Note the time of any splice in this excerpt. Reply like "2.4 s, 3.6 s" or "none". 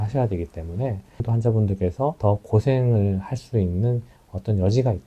1.2 s